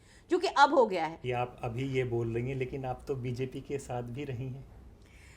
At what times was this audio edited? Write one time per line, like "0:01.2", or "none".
0:01.2